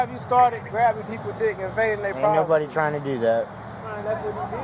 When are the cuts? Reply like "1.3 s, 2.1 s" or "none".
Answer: none